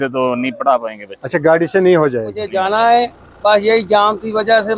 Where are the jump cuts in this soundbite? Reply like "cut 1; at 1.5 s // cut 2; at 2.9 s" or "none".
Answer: cut 1; at 2.5 s